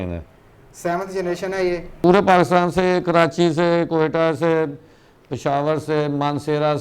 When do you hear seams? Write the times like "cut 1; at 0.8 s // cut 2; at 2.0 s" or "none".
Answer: cut 1; at 2.0 s